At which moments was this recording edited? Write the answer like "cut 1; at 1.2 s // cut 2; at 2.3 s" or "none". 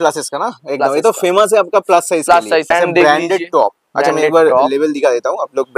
cut 1; at 2.7 s